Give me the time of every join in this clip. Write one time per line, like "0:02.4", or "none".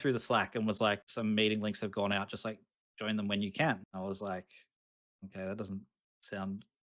0:01.1
0:03.9